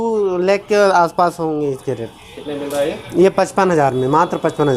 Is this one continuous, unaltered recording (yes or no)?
yes